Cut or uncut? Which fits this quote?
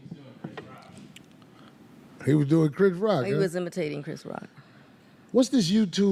uncut